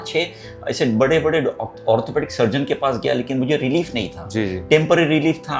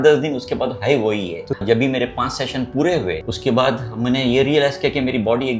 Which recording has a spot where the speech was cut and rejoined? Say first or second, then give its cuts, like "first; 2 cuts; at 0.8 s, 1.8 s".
second; 2 cuts; at 1.6 s, 3.3 s